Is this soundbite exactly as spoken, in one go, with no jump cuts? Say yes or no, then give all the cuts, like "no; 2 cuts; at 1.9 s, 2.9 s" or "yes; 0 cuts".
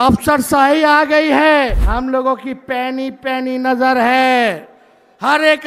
no; 1 cut; at 1.8 s